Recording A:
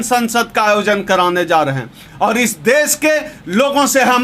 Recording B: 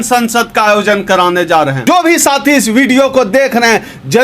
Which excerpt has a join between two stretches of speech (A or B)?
B